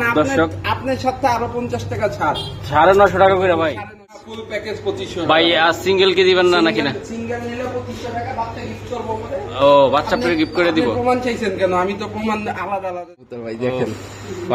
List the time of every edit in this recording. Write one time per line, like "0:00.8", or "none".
0:04.3
0:13.4